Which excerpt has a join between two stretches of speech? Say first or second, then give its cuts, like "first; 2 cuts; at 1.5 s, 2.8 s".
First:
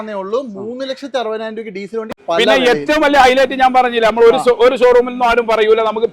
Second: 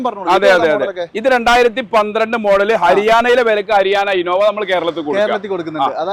first; 1 cut; at 2.1 s